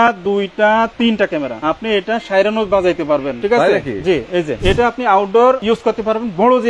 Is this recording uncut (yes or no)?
no